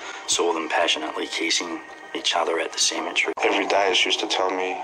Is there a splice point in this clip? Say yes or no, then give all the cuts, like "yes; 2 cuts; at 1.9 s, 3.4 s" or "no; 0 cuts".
yes; 1 cut; at 3.3 s